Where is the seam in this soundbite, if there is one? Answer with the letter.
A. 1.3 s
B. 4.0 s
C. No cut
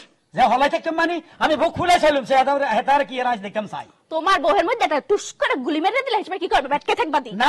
C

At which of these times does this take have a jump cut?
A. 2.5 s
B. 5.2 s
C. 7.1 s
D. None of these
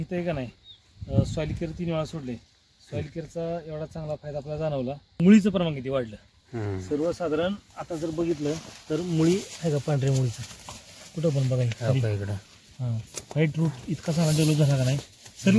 B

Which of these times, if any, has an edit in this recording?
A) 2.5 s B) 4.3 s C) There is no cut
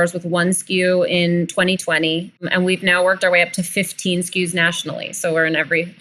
A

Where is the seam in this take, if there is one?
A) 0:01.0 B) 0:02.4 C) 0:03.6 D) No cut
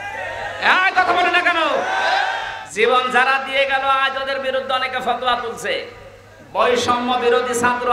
B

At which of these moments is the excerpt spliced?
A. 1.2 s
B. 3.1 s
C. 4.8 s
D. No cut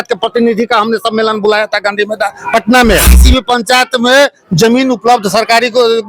B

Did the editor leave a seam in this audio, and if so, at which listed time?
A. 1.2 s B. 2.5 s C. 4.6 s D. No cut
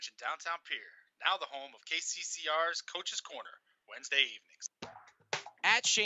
C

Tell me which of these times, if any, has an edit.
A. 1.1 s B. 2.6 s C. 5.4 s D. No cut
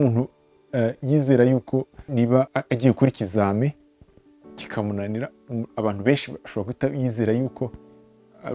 B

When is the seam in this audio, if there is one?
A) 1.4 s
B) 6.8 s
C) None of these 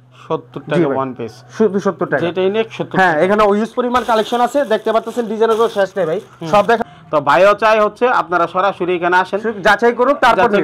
B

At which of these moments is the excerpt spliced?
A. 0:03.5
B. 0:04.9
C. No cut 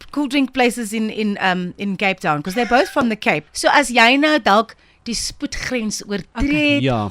A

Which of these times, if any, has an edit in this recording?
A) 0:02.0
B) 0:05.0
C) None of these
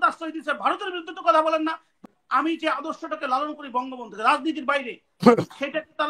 A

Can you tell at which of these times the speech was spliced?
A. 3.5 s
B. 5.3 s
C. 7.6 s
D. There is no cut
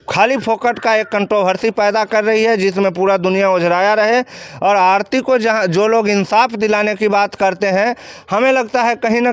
D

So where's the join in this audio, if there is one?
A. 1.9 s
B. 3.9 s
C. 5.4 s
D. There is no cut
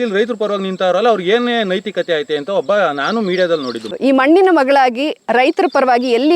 B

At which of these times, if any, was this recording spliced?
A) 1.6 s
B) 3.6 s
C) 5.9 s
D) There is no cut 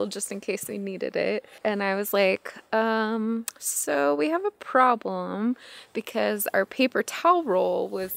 A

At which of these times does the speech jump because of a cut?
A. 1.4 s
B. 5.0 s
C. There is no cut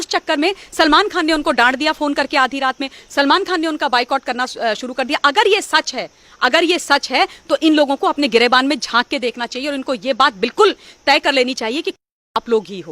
C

